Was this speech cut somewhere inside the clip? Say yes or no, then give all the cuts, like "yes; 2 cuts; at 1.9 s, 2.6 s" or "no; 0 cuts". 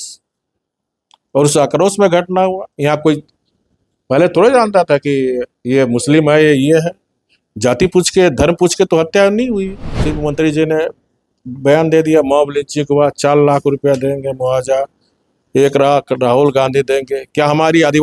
yes; 1 cut; at 10.1 s